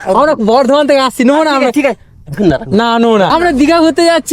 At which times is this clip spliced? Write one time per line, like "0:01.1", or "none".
0:03.3

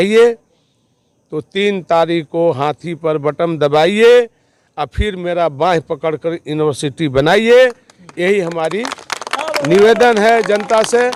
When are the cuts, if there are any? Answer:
none

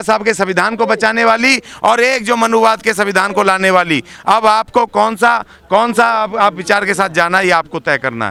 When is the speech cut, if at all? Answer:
none

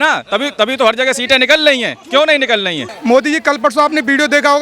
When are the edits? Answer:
0:02.9

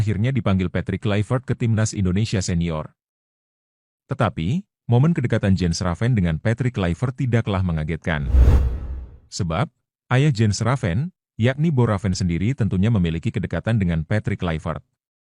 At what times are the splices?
0:02.5

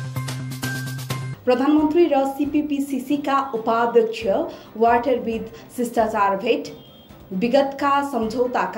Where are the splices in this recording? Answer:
0:01.3

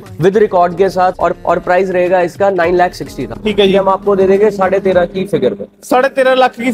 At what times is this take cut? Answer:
0:01.3
0:03.4

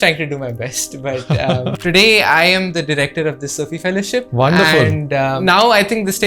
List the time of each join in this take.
0:01.8
0:04.3
0:05.4

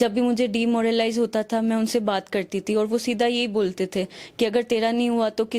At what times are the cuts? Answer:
none

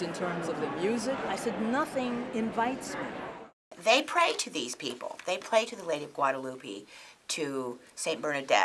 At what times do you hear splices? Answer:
0:01.2
0:03.6

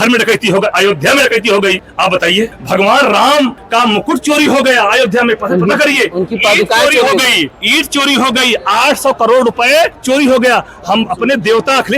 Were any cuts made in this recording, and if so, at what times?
0:02.2
0:03.6
0:07.6
0:10.0

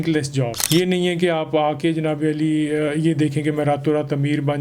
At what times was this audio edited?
none

